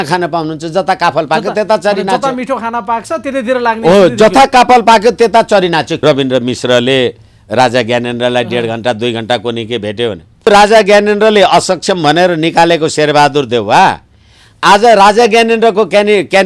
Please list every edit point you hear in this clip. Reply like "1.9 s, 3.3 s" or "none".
6.0 s, 10.5 s